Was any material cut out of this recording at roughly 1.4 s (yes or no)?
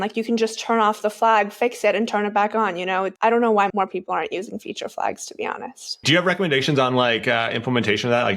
no